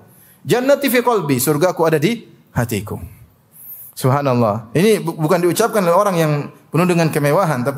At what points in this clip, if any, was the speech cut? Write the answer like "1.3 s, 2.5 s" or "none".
none